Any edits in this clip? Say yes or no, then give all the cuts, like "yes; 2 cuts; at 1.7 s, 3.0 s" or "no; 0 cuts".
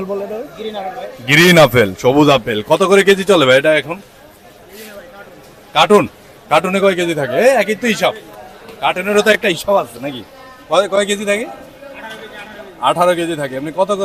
no; 0 cuts